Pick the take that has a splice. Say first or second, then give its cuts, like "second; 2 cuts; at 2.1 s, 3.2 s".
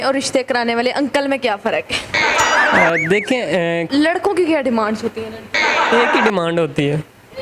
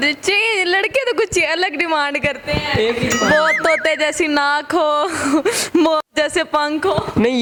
first; 1 cut; at 3.9 s